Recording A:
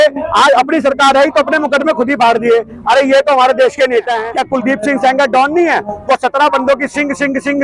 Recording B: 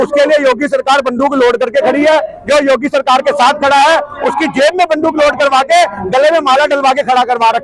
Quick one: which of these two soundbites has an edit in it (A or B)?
A